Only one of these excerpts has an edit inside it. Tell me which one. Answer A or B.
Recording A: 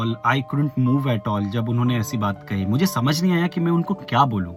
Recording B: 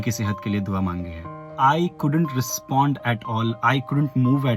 B